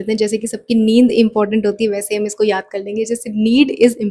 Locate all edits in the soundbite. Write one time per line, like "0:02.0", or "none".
none

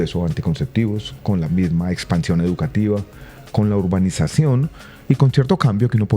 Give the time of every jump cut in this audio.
none

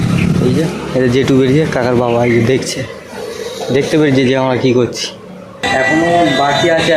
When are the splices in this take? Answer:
0:05.6

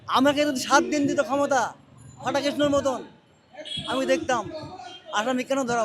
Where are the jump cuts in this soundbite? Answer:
none

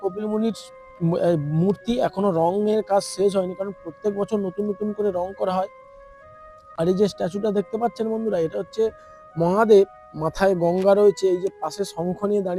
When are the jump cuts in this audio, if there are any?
none

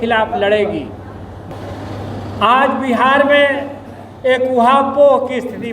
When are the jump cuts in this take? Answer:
0:01.4

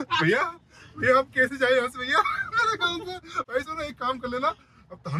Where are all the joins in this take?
none

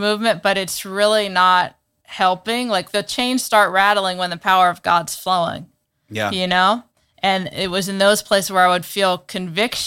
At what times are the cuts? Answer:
0:02.9

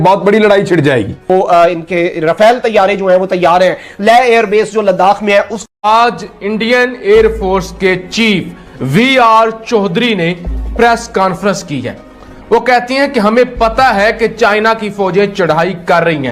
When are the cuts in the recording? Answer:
0:01.2
0:05.9

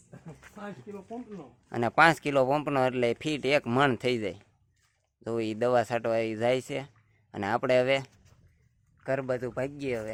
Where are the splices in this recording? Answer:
none

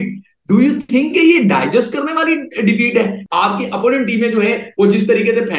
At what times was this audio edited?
0:03.2

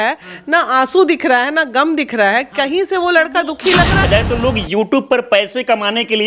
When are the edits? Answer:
0:04.1

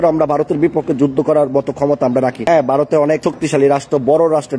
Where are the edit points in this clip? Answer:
0:02.4
0:03.3

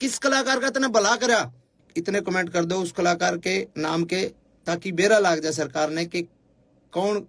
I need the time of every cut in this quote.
0:01.8

